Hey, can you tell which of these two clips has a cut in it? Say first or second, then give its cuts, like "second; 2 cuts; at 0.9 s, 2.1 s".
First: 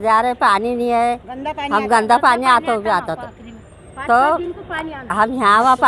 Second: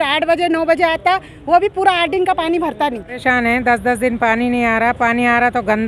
second; 1 cut; at 3.2 s